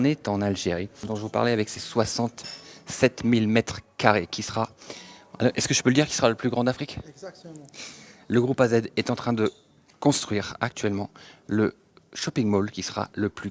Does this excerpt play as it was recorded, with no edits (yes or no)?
no